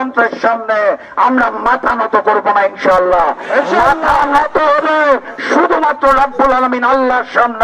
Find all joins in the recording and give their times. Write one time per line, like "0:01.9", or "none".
none